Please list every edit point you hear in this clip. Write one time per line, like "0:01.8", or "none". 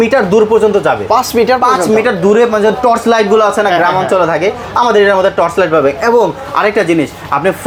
none